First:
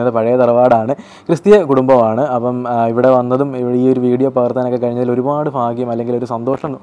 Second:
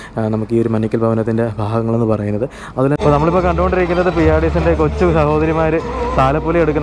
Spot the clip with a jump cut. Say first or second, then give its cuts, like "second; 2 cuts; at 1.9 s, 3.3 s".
second; 1 cut; at 3.0 s